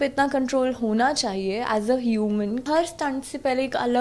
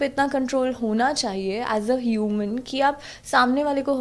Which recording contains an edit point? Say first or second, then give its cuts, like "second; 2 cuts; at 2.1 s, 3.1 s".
first; 1 cut; at 2.6 s